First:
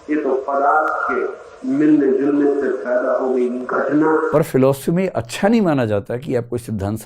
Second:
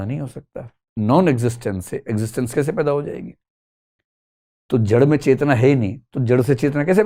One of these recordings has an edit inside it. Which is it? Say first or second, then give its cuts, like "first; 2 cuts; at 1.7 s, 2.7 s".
first; 1 cut; at 4.3 s